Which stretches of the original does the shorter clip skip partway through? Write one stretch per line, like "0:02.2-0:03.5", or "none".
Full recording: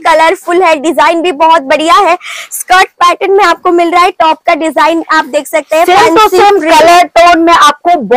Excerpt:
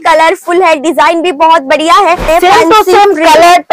0:02.2-0:05.7